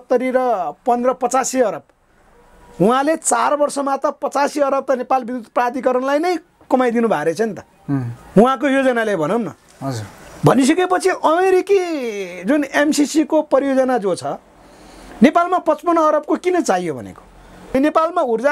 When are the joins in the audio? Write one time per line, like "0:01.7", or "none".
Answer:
0:17.6